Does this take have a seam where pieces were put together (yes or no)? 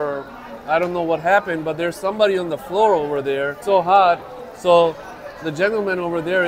yes